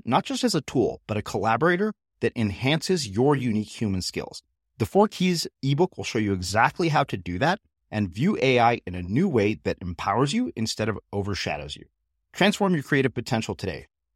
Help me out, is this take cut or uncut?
uncut